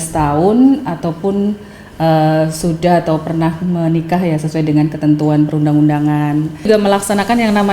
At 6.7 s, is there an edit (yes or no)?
yes